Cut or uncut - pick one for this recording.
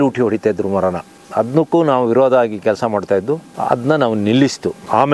uncut